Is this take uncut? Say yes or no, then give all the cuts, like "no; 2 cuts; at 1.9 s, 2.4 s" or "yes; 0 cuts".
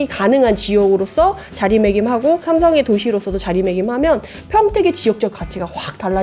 no; 1 cut; at 2.4 s